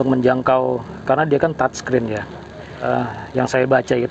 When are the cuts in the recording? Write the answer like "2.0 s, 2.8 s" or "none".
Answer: 2.9 s